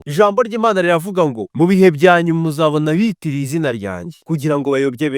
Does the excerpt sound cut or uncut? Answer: cut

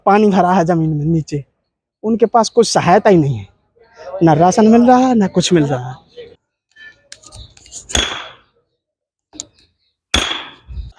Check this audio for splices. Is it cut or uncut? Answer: uncut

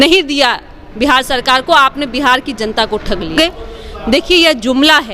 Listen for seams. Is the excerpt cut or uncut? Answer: cut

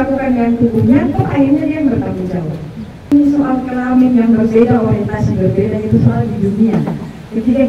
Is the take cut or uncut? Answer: cut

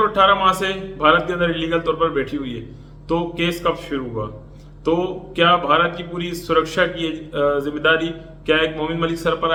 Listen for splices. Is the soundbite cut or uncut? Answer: uncut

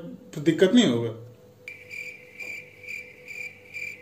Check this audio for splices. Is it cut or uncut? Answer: uncut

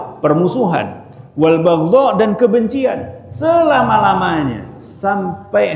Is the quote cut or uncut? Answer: uncut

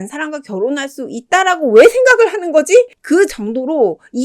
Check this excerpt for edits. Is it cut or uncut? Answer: cut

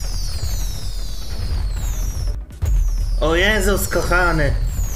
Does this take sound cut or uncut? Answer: cut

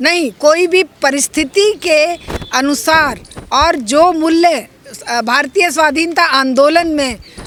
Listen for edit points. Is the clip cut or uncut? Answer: uncut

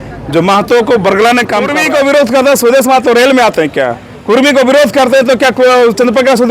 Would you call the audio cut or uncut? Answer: cut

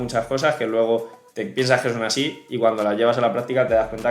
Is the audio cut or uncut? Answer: uncut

